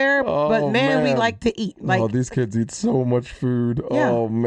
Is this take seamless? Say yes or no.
yes